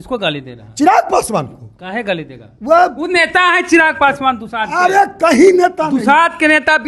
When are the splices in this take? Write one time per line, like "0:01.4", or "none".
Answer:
none